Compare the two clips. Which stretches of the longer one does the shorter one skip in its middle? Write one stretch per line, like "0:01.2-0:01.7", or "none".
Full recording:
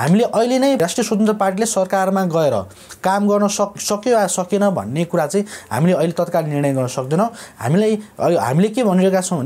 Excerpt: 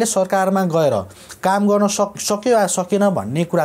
none

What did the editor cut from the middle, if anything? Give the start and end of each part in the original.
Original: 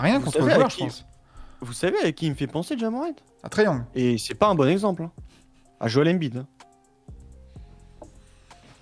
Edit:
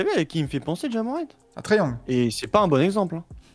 none

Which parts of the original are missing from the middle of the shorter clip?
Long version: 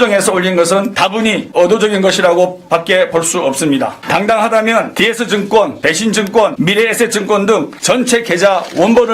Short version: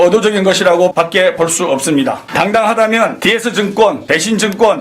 0:02.5-0:02.7

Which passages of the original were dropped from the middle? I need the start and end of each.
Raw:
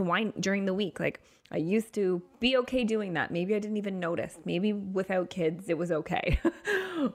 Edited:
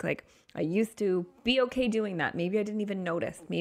none

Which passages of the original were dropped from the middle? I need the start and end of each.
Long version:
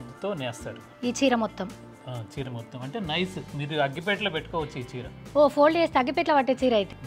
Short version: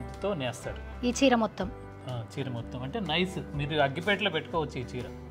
none

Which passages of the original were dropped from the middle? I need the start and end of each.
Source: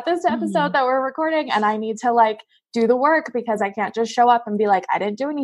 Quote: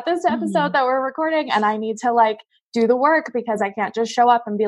none

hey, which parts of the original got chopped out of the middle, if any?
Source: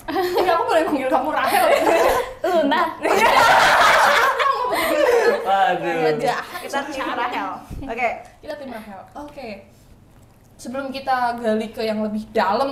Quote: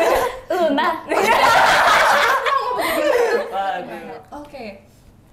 0:05.8-0:08.7

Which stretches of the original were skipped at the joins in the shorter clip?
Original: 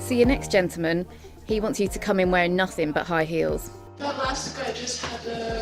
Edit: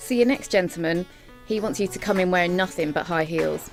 none

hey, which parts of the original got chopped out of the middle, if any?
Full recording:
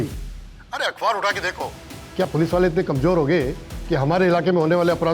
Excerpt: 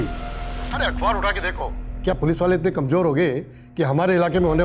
0:01.8-0:02.0

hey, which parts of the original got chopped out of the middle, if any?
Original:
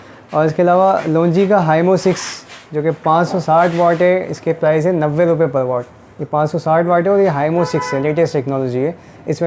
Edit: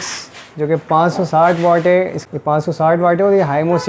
0:04.3-0:06.0

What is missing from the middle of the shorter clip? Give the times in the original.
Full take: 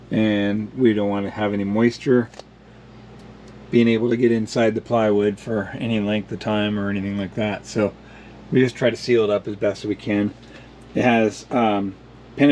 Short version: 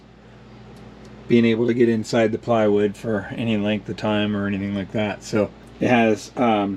0:08.1-0:10.8

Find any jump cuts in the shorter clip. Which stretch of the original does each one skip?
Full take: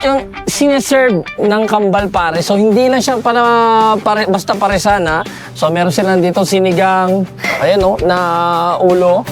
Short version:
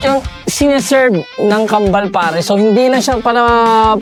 none

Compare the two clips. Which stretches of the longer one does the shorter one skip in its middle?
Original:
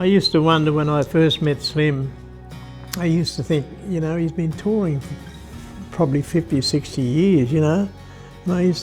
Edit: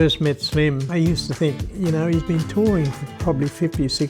0:02.0-0:02.9
0:05.1-0:05.8

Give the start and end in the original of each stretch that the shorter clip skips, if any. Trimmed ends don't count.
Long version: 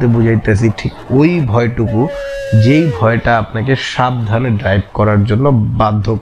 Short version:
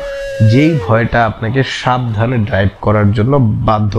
none

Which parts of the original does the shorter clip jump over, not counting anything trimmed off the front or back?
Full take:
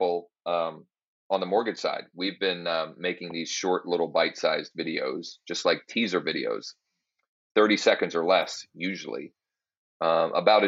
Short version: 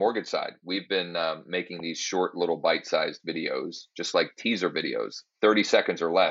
0:06.7-0:07.4

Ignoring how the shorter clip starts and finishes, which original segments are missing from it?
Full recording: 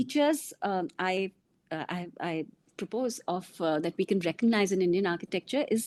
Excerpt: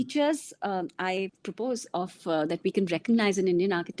0:01.4-0:02.8

